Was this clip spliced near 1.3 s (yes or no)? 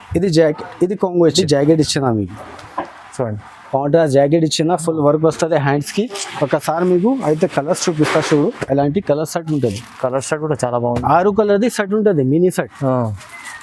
yes